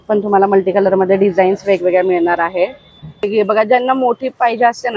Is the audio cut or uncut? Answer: cut